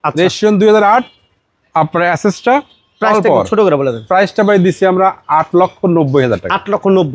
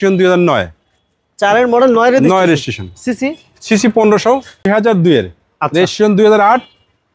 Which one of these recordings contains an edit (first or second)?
second